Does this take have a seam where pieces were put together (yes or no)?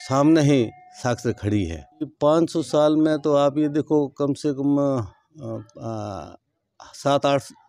yes